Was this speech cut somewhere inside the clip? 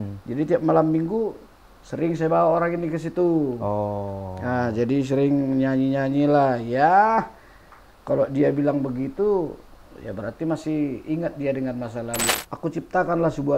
yes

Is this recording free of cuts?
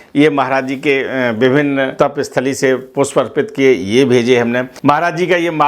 no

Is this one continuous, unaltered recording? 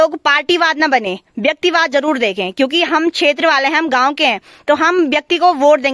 yes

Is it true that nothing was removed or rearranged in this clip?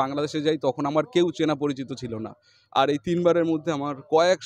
yes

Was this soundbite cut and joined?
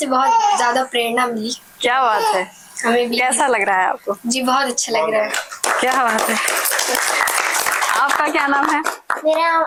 no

